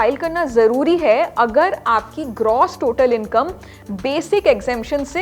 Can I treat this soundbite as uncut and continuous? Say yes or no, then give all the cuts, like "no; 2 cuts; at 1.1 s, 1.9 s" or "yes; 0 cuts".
yes; 0 cuts